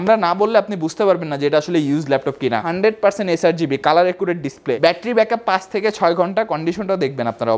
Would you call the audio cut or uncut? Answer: cut